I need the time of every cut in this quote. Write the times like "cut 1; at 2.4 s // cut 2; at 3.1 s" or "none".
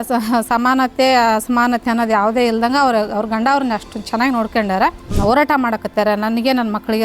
cut 1; at 5.1 s